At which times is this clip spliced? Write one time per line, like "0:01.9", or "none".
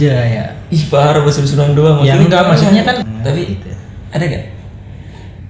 0:03.1